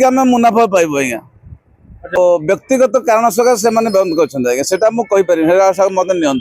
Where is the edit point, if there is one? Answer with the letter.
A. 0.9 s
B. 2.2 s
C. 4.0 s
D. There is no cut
B